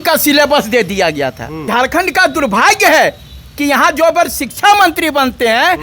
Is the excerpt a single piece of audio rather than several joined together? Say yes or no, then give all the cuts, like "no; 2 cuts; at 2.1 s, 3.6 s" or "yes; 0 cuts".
no; 1 cut; at 1.7 s